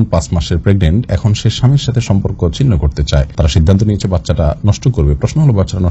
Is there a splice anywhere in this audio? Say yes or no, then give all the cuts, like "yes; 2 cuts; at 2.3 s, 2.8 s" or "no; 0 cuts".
no; 0 cuts